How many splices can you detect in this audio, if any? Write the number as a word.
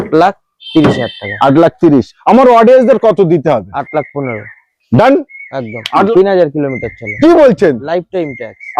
one